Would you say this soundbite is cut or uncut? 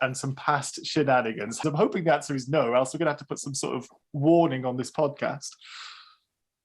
cut